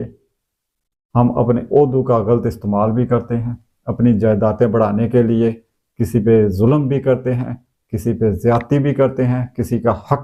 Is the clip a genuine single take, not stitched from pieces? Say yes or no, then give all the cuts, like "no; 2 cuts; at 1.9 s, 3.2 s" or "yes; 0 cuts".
yes; 0 cuts